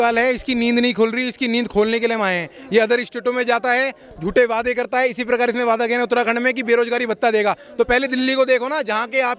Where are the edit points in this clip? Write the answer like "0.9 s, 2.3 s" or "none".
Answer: none